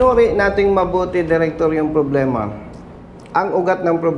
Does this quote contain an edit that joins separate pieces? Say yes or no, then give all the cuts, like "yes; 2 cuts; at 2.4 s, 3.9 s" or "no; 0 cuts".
no; 0 cuts